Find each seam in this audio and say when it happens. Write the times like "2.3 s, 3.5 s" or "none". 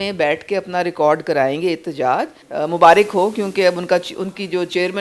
2.4 s